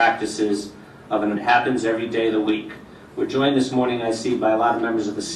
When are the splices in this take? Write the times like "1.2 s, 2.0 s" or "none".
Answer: none